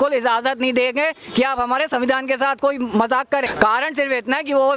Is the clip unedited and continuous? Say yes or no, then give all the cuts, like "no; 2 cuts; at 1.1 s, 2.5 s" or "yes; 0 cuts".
no; 1 cut; at 3.5 s